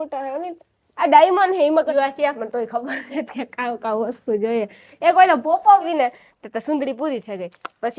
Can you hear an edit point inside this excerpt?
yes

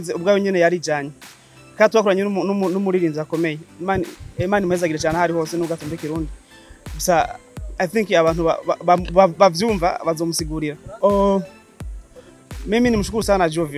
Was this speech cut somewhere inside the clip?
yes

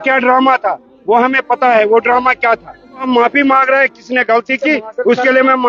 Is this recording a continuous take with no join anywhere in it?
no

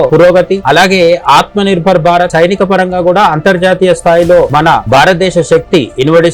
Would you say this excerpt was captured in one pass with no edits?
no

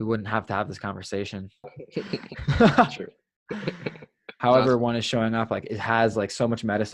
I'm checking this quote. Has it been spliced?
yes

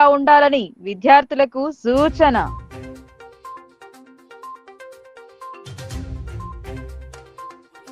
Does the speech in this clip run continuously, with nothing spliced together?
yes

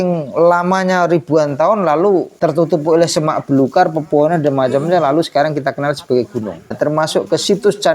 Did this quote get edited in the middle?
yes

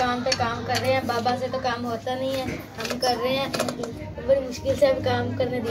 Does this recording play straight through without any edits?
no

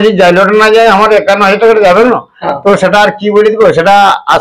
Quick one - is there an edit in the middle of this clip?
no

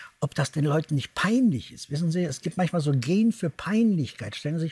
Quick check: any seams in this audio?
no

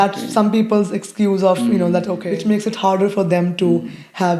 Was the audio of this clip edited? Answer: yes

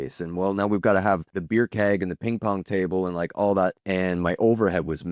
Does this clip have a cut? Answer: yes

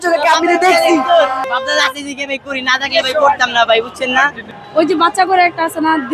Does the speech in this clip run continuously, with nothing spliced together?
no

